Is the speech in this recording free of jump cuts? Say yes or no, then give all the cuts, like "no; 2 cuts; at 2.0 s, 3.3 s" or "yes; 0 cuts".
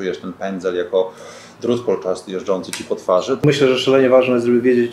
no; 1 cut; at 3.4 s